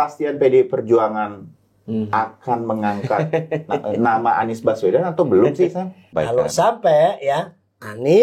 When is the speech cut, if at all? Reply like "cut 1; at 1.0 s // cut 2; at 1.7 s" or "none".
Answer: cut 1; at 6.0 s